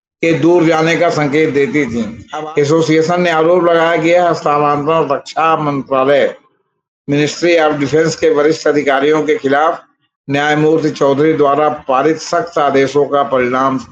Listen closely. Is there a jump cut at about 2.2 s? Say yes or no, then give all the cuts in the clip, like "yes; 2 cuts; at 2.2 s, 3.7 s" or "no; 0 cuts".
yes; 1 cut; at 2.2 s